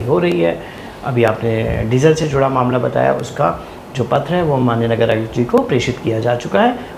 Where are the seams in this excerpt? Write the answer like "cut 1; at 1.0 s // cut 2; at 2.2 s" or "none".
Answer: none